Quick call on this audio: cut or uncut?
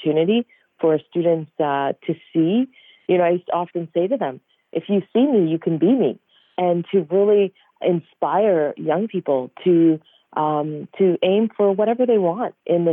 uncut